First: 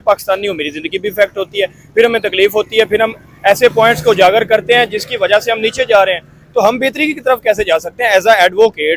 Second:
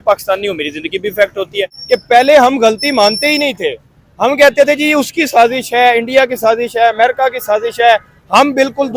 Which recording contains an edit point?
second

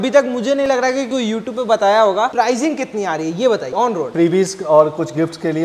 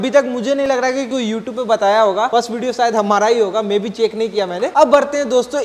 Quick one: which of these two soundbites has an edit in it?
first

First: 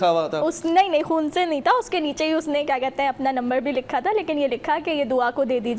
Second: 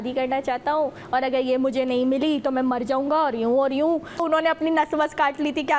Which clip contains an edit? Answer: second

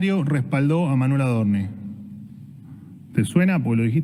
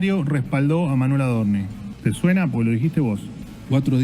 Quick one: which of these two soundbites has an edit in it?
second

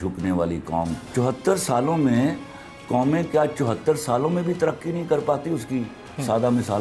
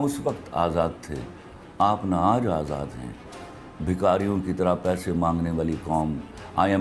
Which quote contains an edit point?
first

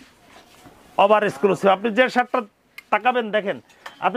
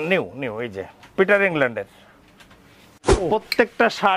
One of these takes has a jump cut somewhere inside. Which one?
second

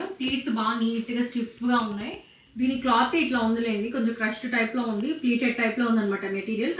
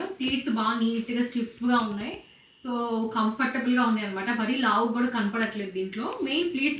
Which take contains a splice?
first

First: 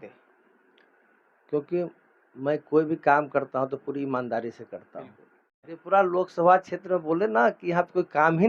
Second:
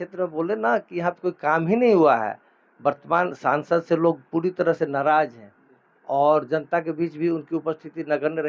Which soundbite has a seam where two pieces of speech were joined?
first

